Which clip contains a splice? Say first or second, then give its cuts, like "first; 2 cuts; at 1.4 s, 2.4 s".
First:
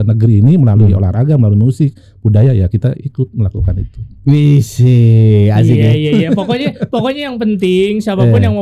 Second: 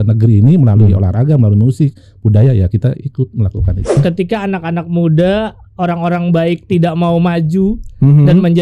second; 1 cut; at 4.0 s